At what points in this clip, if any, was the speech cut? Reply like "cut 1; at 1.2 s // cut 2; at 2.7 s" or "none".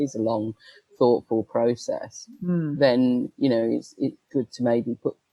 cut 1; at 4.2 s